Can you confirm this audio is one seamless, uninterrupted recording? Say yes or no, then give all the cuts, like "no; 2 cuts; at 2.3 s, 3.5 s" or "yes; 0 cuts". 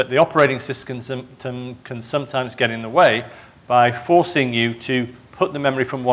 no; 1 cut; at 2.3 s